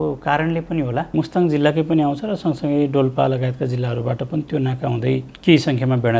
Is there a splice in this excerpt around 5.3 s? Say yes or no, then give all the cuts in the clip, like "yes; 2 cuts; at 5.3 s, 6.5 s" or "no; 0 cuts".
yes; 2 cuts; at 1.1 s, 5.3 s